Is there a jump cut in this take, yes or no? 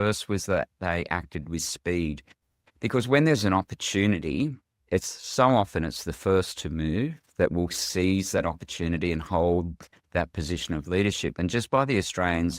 no